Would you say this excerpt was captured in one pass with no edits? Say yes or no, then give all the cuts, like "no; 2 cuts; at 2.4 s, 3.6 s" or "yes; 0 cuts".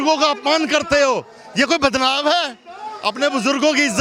yes; 0 cuts